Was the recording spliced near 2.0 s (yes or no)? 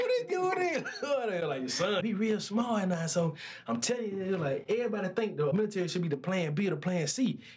yes